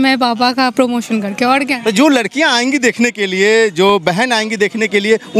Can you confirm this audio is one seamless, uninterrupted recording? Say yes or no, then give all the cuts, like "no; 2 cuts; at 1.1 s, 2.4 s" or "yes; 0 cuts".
yes; 0 cuts